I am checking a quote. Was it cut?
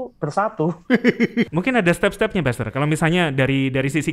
yes; 1 cut; at 1.5 s

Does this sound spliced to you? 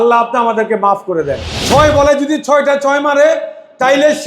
yes; 1 cut; at 1.5 s

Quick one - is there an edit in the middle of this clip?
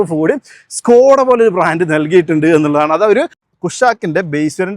yes; 1 cut; at 3.5 s

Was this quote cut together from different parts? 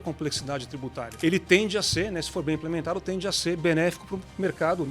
yes; 1 cut; at 1.0 s

